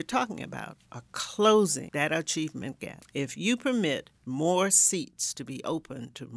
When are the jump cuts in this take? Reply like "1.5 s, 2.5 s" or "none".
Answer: 1.8 s, 2.9 s